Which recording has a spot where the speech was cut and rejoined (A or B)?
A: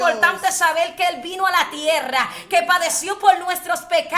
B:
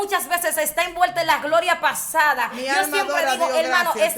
B